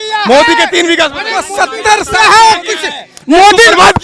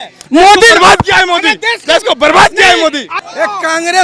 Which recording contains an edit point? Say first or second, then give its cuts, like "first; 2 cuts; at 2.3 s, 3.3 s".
second; 1 cut; at 3.1 s